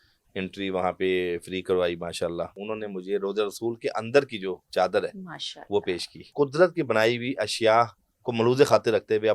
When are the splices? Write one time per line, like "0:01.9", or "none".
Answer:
0:02.6
0:06.3